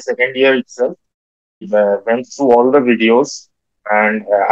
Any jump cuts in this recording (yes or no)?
no